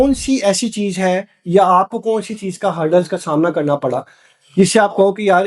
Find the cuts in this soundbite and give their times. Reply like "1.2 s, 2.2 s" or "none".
none